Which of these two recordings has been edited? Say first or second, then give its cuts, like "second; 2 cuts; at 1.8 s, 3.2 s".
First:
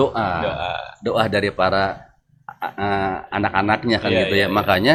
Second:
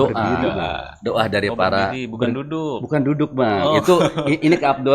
second; 1 cut; at 2.0 s